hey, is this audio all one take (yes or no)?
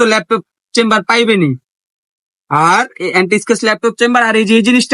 yes